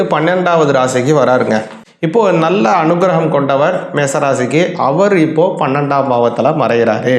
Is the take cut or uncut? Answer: cut